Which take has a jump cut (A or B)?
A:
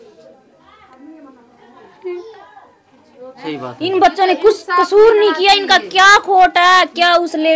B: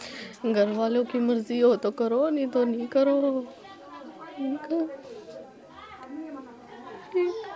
A